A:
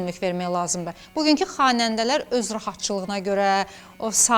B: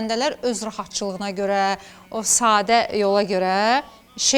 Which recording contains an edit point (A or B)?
A